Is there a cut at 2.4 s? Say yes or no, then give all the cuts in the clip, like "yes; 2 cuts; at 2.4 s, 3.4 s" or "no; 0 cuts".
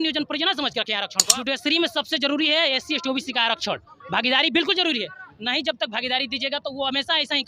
no; 1 cut; at 1.1 s